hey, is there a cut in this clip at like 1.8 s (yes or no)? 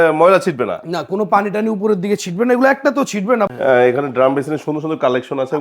no